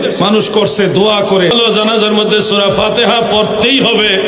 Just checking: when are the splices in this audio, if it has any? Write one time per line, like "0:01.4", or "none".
0:01.6

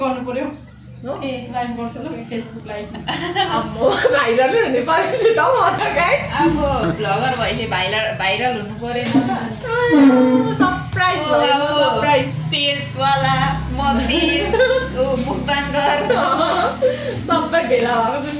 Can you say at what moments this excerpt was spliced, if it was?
none

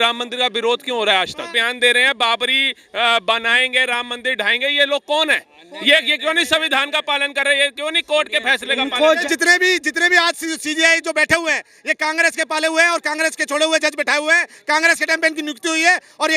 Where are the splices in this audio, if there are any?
0:01.6
0:09.2

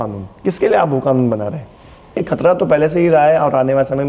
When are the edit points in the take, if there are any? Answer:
0:02.2

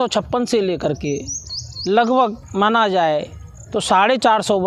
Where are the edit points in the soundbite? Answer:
none

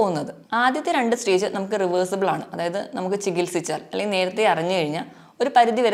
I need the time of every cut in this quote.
none

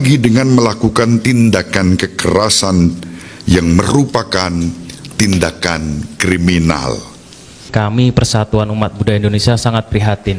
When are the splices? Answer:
0:07.7

